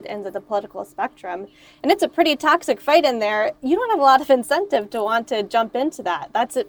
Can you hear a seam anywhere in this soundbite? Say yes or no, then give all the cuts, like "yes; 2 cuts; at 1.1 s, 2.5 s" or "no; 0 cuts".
no; 0 cuts